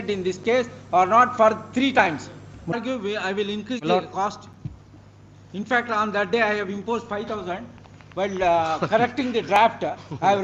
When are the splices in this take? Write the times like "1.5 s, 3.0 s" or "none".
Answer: 2.7 s

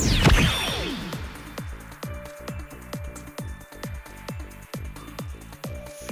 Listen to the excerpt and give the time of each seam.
1.1 s

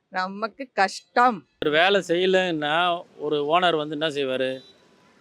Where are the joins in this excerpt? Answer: 1.6 s

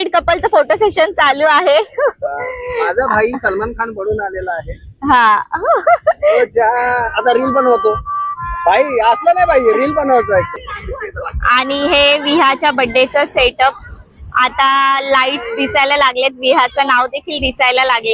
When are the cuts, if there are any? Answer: 10.5 s

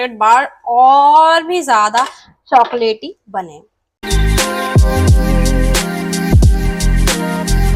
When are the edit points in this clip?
none

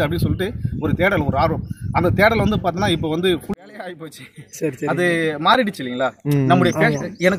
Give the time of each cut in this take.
3.6 s

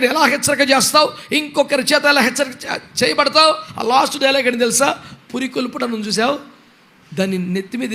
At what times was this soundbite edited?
3.7 s

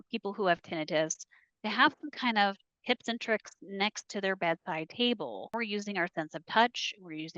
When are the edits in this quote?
5.5 s

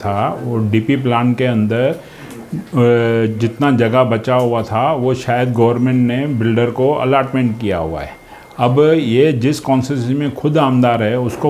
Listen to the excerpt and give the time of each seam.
none

